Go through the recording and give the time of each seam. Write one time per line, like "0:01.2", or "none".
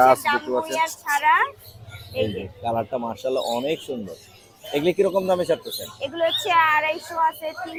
none